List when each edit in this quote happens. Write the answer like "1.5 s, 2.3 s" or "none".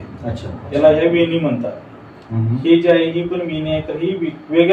none